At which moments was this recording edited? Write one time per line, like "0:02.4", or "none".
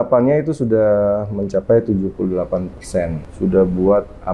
0:03.2